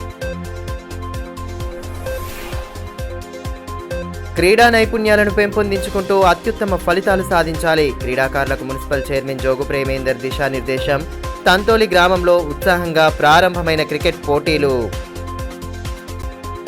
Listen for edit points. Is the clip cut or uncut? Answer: cut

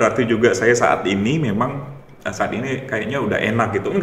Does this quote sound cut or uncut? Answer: uncut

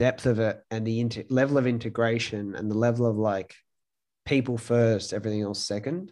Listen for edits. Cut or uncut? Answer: uncut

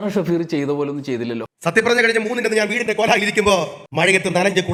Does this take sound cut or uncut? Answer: uncut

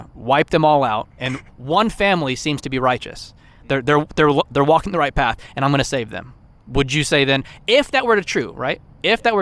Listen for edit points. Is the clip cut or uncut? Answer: uncut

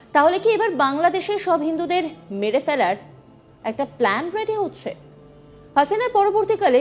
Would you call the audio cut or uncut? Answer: uncut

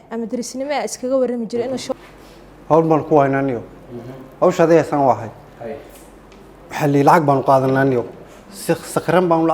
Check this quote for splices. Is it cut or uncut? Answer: cut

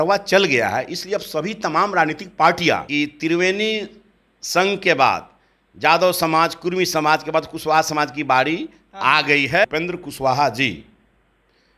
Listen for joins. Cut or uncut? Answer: cut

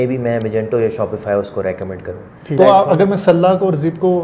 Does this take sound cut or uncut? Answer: cut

